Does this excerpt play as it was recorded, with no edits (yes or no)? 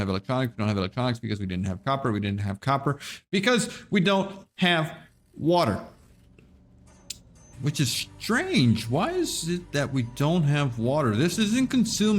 yes